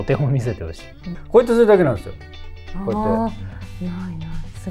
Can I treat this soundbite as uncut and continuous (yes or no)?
no